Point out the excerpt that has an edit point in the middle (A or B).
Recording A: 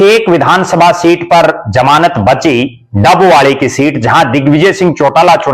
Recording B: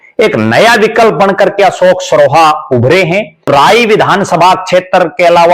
B